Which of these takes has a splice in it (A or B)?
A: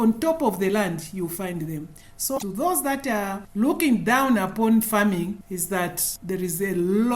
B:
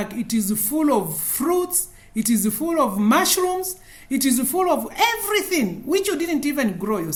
A